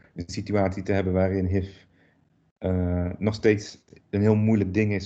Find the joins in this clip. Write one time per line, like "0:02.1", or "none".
none